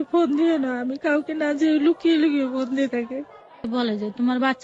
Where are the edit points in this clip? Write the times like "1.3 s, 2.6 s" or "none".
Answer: 3.6 s